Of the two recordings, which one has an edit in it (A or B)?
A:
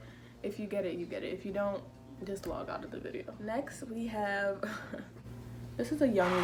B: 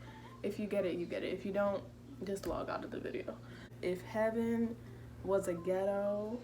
B